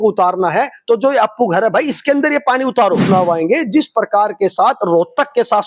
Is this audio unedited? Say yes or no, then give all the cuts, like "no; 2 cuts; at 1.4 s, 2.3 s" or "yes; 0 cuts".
no; 1 cut; at 3.1 s